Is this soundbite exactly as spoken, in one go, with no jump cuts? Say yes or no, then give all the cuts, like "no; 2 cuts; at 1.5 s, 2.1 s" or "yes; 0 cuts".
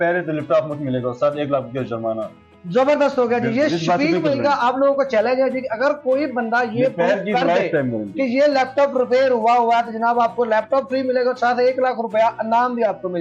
yes; 0 cuts